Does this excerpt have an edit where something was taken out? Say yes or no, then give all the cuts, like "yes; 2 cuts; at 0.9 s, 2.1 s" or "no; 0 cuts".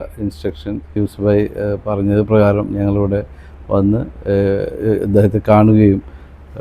yes; 1 cut; at 0.9 s